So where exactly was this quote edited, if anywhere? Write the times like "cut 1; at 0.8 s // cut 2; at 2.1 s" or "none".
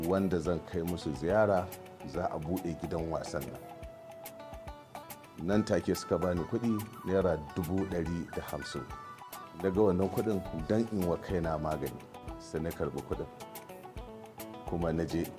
cut 1; at 9.0 s